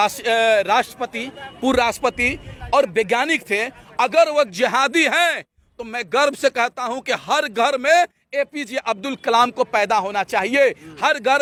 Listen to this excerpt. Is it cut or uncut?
uncut